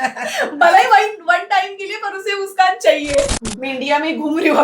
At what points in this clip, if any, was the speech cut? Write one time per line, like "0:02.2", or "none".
0:03.3

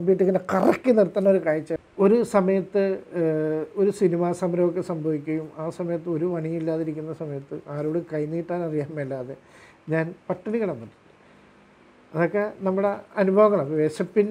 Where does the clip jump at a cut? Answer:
0:01.7

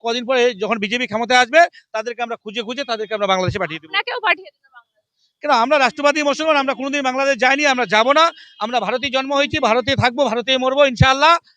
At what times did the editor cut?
none

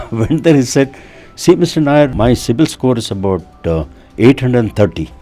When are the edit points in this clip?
0:02.1

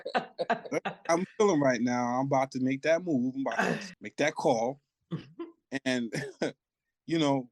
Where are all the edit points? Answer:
0:04.0

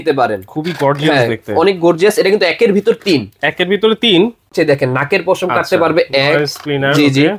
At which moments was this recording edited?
0:04.5

